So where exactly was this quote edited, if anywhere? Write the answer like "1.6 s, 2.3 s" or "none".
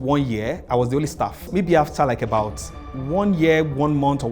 1.5 s